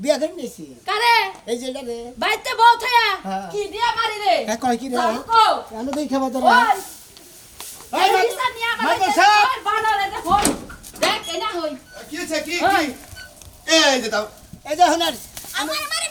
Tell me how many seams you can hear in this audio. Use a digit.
0